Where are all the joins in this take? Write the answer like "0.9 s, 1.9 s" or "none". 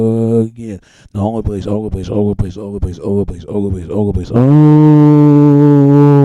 none